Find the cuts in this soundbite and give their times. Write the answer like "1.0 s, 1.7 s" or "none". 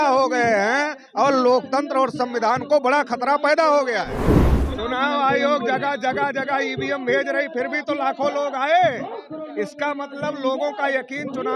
4.4 s